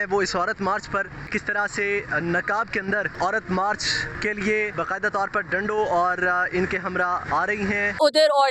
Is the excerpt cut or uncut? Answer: cut